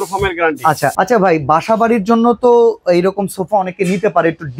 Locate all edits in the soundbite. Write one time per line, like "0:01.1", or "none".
0:00.9